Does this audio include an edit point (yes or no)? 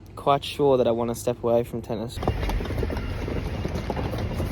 yes